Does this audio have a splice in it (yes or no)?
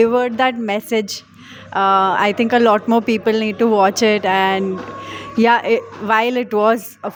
no